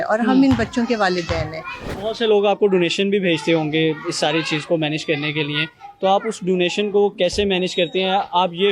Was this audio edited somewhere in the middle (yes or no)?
yes